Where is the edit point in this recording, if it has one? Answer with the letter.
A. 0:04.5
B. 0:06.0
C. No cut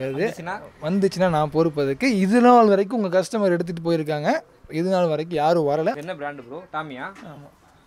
B